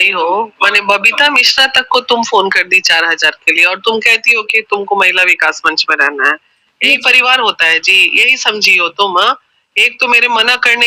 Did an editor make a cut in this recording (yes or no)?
no